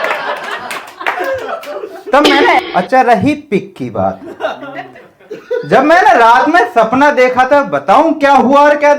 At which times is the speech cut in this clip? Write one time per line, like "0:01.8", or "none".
0:02.6

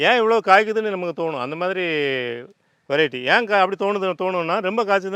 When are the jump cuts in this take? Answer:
none

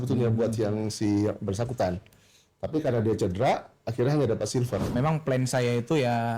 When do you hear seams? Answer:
0:04.9

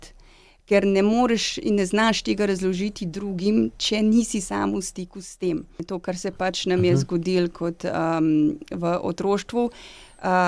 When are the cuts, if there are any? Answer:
0:05.9

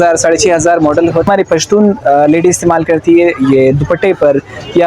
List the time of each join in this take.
0:01.3

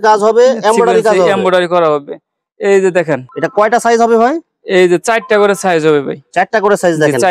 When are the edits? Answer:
none

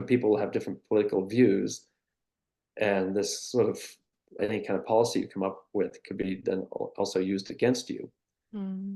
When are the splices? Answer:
none

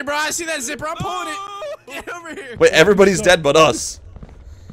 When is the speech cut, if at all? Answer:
0:02.5

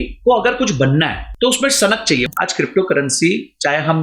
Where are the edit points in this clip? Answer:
0:01.2
0:02.2

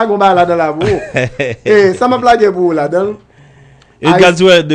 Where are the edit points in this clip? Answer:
none

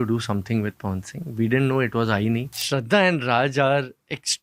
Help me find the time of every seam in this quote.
0:02.6

